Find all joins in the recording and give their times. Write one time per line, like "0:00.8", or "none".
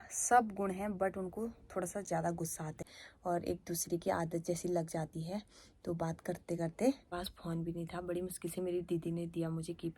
0:02.7
0:07.1